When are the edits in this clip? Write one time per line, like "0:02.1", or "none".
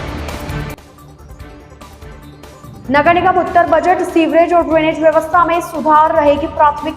none